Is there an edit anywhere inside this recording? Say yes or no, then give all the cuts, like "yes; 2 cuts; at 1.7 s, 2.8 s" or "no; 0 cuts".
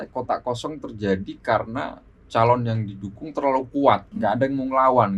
yes; 1 cut; at 4.1 s